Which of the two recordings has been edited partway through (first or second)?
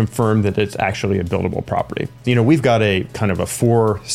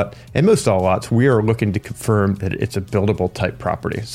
first